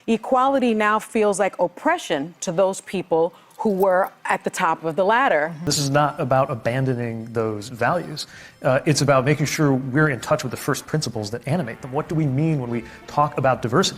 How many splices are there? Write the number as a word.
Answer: one